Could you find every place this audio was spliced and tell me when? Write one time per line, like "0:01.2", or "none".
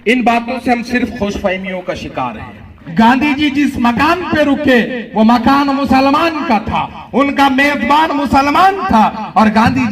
0:02.8